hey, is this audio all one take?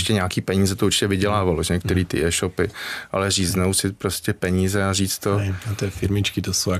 yes; 0 cuts

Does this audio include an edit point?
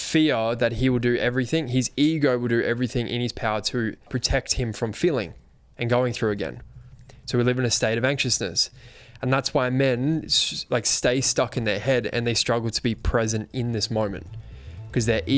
yes; 1 cut; at 4.1 s

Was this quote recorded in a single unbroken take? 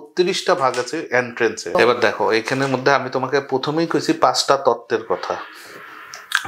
no; 1 cut; at 1.8 s

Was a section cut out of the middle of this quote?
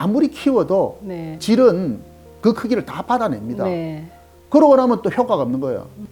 yes; 1 cut; at 1.4 s

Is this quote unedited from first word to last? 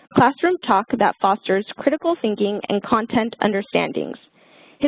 yes; 0 cuts

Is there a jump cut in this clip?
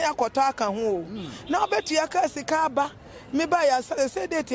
no; 0 cuts

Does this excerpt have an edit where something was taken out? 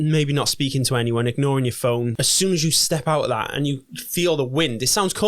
yes; 1 cut; at 2.2 s

